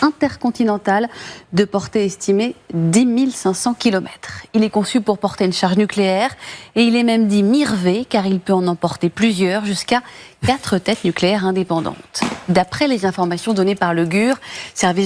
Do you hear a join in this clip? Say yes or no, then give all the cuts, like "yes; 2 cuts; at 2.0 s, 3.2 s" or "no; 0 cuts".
no; 0 cuts